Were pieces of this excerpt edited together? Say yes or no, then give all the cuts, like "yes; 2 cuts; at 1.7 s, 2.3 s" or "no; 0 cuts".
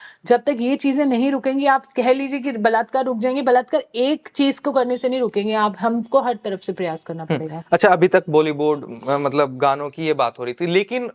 no; 0 cuts